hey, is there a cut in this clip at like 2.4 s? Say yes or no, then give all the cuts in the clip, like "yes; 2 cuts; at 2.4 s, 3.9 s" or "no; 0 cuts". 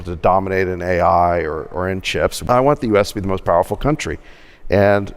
yes; 1 cut; at 2.4 s